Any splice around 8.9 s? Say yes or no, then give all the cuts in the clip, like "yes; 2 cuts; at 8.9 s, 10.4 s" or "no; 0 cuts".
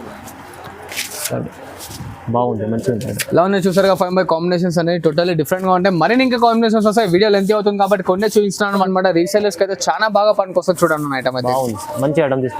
yes; 1 cut; at 8.9 s